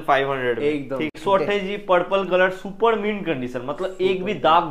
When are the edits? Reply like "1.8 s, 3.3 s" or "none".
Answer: 1.2 s